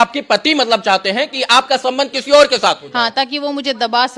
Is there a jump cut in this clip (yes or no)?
no